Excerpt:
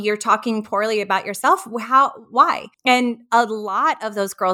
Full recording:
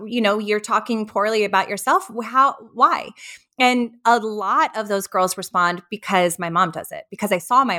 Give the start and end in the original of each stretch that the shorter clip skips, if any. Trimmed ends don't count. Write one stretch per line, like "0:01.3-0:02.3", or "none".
0:03.1-0:03.4

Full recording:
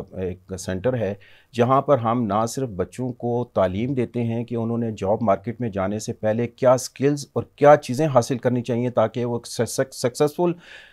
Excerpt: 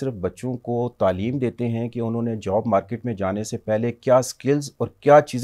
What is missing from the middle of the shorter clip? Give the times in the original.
none

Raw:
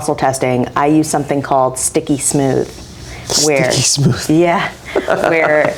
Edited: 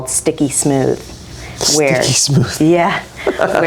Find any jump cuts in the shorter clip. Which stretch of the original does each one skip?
none

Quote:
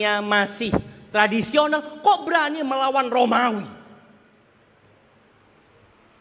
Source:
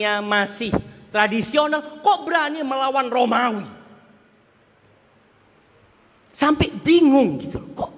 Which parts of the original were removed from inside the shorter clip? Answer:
none

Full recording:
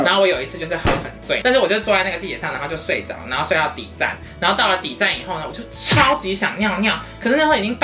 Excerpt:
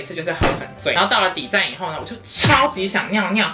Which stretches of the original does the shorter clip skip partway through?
0:01.4-0:04.4

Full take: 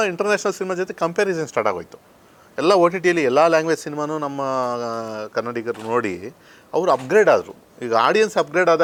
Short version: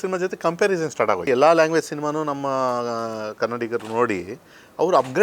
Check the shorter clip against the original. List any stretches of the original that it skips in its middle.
0:01.8-0:03.2

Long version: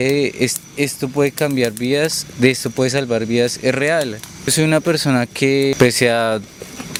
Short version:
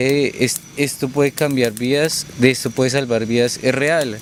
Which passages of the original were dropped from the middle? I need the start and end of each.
none

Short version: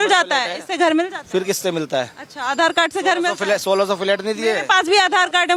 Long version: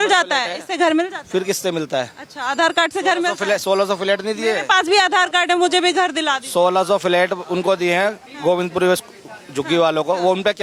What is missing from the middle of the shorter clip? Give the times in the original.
none

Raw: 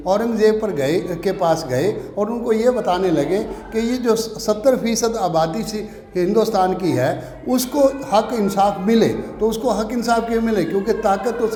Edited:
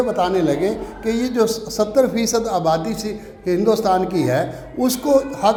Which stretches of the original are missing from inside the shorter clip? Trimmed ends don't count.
none

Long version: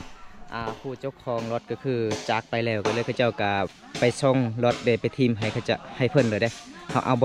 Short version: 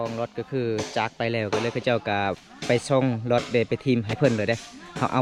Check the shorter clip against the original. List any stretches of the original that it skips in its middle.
0:05.5-0:06.1

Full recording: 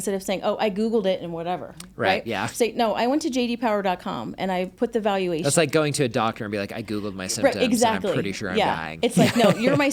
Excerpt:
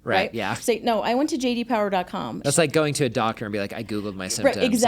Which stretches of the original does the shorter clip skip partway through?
0:04.3-0:05.4

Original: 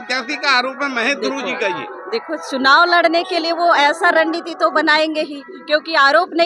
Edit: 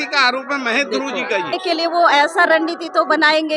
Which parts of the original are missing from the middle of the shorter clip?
0:01.9-0:03.2

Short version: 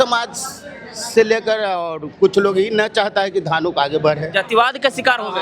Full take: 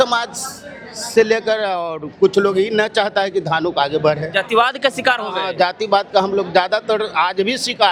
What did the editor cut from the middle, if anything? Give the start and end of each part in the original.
none

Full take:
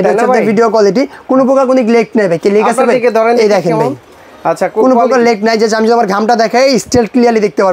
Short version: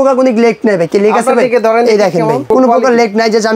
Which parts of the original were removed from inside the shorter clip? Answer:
0:04.0-0:04.7

